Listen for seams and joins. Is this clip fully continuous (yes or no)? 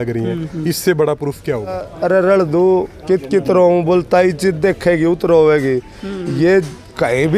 no